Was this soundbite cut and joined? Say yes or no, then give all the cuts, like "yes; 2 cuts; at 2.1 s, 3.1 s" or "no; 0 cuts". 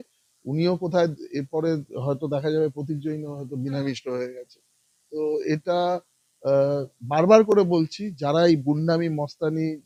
no; 0 cuts